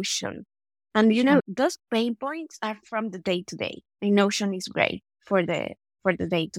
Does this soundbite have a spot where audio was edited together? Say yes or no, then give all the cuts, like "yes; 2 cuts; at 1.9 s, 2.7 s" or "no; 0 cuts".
yes; 1 cut; at 1.5 s